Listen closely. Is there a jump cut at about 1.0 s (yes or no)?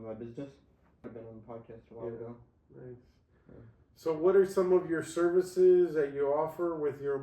yes